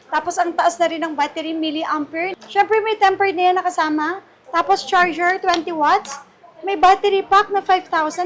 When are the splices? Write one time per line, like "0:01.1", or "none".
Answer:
0:02.3